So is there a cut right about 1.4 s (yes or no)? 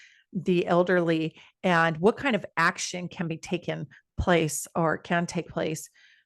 no